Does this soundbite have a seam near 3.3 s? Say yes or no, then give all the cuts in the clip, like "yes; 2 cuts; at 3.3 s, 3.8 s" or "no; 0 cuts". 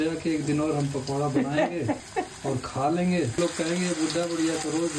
yes; 1 cut; at 3.3 s